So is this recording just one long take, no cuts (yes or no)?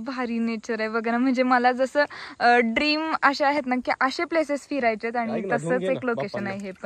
yes